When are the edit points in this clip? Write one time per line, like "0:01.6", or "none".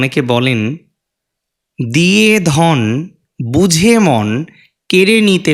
none